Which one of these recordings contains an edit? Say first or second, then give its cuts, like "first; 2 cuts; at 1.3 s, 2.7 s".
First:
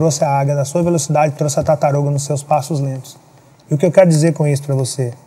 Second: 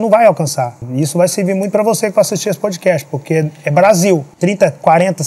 second; 2 cuts; at 0.8 s, 4.3 s